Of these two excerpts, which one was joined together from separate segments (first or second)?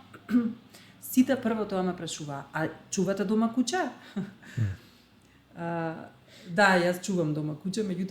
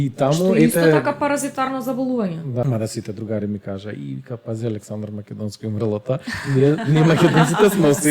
second